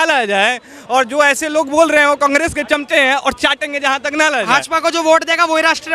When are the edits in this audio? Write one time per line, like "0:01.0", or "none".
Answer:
0:04.5